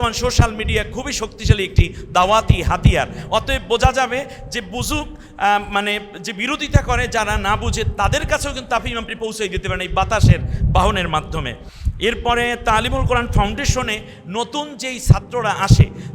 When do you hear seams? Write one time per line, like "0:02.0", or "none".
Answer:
none